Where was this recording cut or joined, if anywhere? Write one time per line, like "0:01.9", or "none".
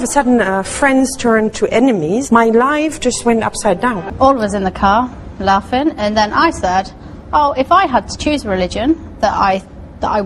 0:04.0

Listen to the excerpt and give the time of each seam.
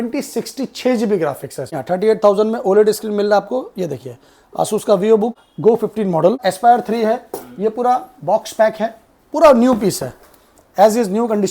0:01.8
0:05.5
0:06.4

